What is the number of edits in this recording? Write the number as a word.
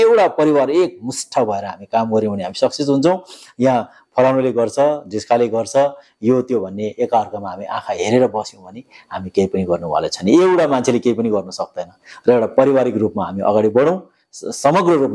zero